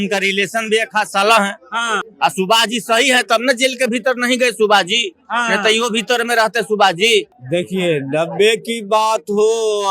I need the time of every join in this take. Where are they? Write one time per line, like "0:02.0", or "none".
0:02.0
0:07.4